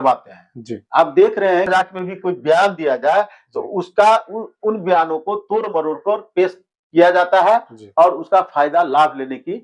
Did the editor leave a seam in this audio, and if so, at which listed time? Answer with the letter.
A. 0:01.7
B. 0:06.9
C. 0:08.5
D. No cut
A